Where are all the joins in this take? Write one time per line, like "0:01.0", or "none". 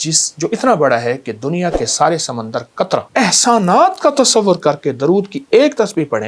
0:03.1